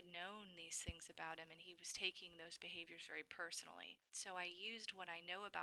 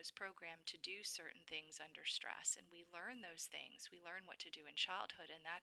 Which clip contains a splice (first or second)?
first